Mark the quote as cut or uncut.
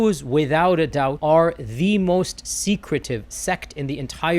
cut